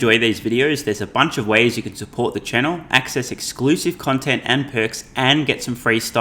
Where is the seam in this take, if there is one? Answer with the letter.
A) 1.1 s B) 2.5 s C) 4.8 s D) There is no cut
D